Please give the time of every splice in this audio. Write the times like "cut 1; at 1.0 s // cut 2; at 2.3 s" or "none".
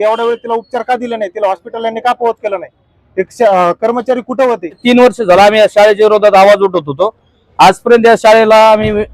cut 1; at 4.8 s